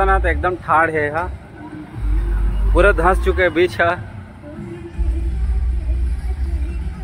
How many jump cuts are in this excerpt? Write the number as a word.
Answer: zero